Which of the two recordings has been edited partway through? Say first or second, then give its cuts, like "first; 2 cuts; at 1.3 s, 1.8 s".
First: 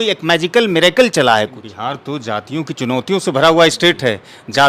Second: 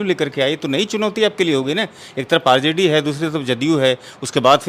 first; 1 cut; at 1.7 s